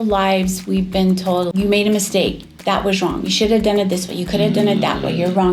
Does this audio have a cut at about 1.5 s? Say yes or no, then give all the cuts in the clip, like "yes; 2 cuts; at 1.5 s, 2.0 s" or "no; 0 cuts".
yes; 1 cut; at 1.5 s